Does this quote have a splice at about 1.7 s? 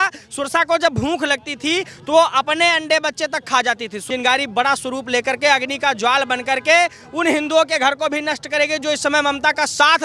no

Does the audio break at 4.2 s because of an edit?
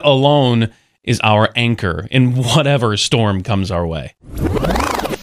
yes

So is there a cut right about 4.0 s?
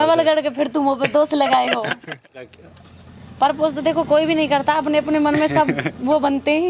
no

